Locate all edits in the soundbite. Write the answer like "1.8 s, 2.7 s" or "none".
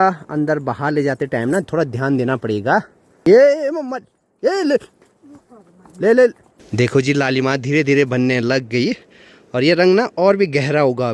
6.6 s